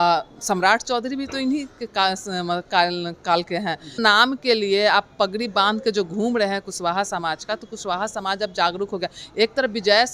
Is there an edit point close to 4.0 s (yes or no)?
yes